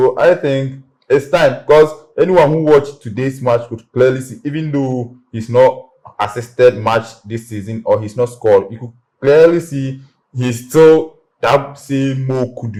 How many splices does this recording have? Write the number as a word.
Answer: zero